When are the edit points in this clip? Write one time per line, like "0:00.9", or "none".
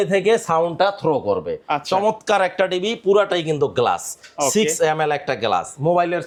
none